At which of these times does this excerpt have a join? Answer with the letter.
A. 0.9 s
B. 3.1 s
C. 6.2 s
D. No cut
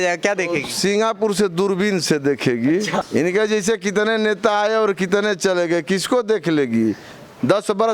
B